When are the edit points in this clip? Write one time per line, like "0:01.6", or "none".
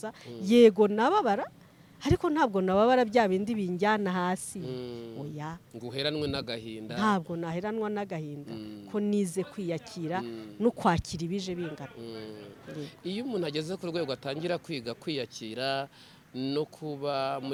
none